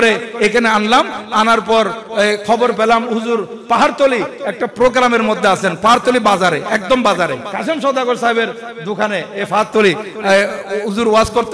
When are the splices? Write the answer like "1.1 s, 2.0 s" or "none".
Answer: 7.5 s